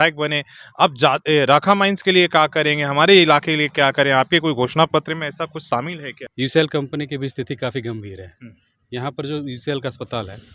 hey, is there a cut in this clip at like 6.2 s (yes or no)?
yes